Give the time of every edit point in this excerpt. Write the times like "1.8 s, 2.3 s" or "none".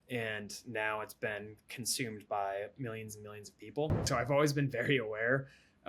4.0 s